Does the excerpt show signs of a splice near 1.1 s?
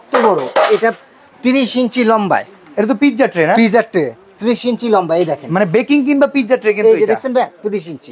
no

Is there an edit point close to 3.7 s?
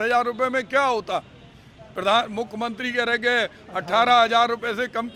no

